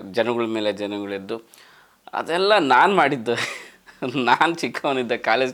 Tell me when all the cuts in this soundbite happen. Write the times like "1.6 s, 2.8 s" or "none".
none